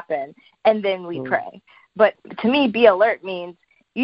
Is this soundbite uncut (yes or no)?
no